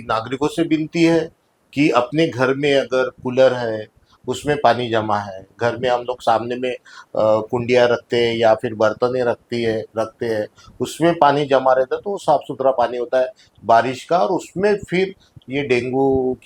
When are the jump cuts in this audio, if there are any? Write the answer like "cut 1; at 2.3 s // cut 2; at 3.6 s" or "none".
none